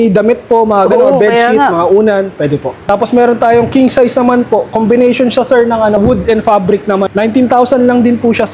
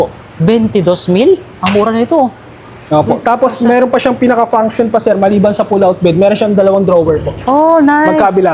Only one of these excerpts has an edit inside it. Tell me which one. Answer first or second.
first